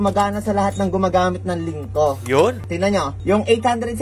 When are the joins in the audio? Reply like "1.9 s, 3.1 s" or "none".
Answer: none